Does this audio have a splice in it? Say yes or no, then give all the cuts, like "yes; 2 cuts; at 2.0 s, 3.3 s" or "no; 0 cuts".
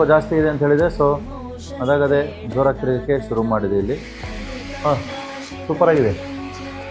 no; 0 cuts